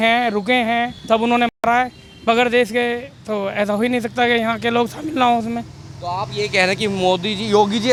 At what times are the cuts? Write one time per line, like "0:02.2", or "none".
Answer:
none

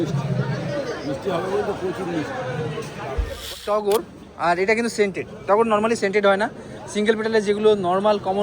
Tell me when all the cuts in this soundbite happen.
0:03.5

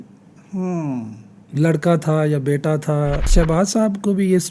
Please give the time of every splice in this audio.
0:03.3

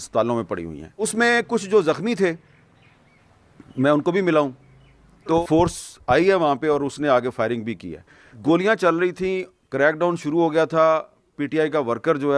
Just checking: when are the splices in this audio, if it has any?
0:01.1
0:05.4
0:08.3

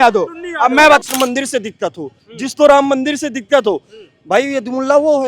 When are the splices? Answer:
0:01.0

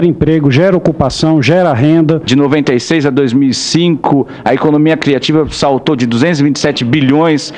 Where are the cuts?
0:02.3

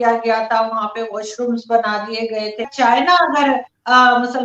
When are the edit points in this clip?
0:02.6

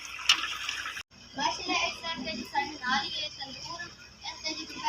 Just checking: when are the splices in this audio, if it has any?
0:01.1

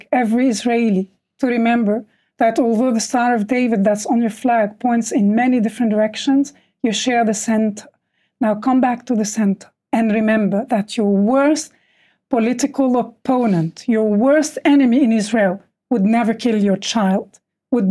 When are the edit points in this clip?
0:09.7

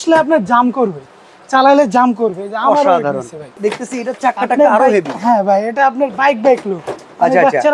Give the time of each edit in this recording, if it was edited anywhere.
0:03.6

